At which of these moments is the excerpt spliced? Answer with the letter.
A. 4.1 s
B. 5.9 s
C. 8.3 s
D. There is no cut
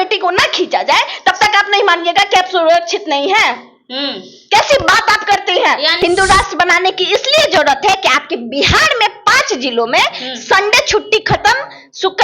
B